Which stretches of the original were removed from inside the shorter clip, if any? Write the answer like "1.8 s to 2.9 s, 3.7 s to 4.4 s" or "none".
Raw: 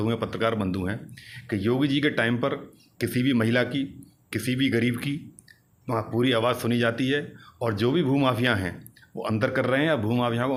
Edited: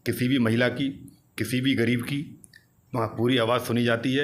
none

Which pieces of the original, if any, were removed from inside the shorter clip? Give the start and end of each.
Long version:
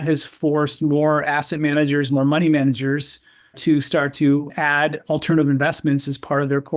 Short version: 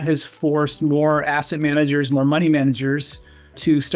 none

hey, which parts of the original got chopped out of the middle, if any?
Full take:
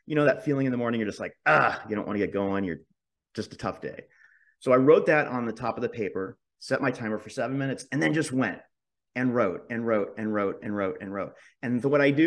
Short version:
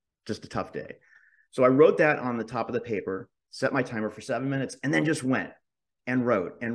none

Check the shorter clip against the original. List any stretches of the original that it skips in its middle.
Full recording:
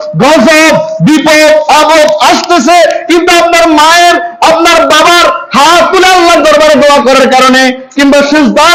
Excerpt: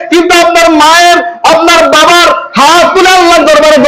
none

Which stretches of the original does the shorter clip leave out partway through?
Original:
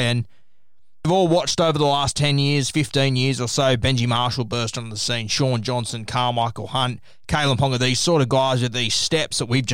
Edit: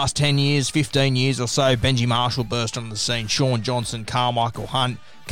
none

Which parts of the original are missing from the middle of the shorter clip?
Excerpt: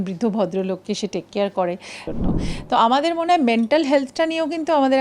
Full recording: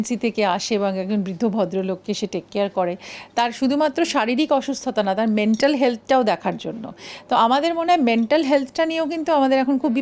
3.2 s to 6.6 s

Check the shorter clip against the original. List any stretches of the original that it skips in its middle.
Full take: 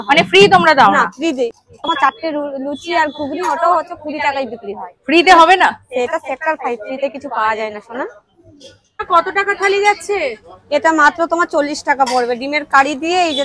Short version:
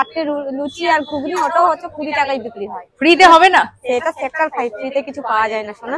none

